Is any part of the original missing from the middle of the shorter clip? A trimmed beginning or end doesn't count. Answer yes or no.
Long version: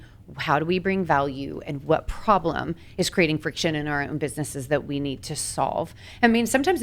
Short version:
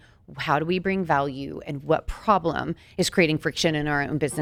no